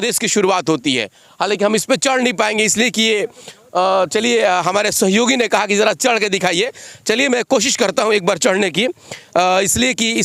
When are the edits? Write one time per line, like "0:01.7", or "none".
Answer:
none